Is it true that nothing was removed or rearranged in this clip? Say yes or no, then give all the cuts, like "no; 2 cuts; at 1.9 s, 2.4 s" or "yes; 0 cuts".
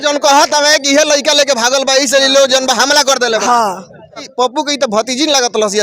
no; 1 cut; at 4.3 s